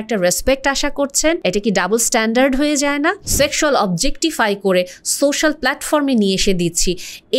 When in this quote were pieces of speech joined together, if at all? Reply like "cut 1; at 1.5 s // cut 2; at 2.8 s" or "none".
cut 1; at 1.4 s // cut 2; at 3.2 s